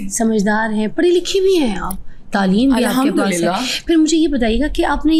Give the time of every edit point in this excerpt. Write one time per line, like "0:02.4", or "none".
none